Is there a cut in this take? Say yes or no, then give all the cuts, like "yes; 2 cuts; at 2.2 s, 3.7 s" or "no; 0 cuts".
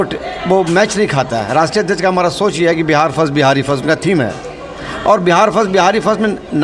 no; 0 cuts